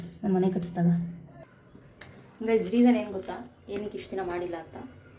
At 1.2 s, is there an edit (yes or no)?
yes